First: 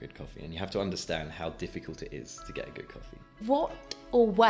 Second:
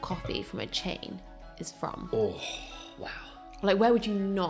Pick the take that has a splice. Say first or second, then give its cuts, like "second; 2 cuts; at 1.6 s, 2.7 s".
first; 1 cut; at 3.3 s